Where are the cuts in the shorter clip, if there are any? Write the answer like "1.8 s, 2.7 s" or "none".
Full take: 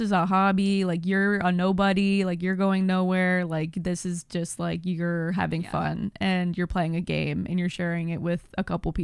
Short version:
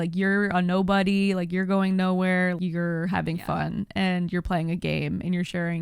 2.6 s